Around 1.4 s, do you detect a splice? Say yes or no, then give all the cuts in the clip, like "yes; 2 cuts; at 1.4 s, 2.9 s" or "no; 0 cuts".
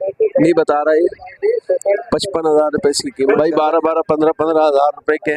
no; 1 cut; at 3.2 s